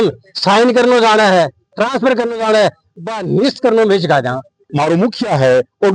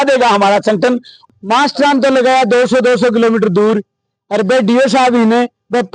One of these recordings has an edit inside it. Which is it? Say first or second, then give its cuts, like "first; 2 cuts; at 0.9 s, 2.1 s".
second; 1 cut; at 1.4 s